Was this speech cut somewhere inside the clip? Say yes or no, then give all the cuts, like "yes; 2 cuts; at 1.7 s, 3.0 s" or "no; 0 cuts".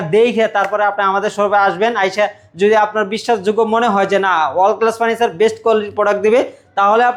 no; 0 cuts